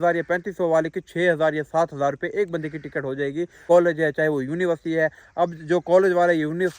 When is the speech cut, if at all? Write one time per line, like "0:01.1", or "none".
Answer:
0:03.6